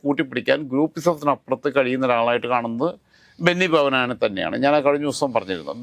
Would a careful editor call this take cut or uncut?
uncut